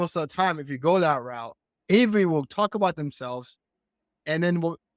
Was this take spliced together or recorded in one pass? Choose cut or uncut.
uncut